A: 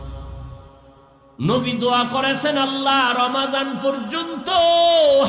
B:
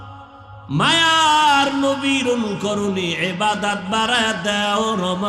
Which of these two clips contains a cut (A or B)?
A